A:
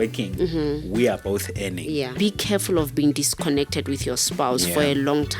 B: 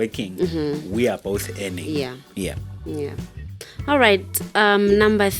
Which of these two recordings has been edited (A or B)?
A